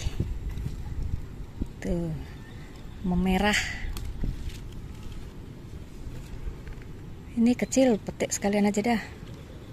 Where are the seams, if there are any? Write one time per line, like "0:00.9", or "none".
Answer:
none